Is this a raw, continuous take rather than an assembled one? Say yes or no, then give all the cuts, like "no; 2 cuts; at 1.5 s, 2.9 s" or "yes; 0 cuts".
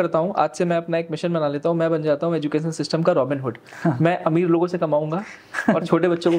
yes; 0 cuts